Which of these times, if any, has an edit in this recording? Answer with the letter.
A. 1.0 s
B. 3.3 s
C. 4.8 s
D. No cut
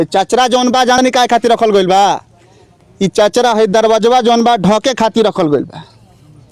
A